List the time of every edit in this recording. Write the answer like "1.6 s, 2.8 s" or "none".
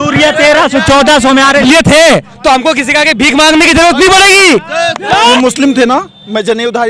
1.6 s, 5.2 s